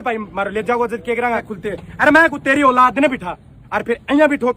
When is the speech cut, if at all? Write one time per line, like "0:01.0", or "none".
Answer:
0:01.5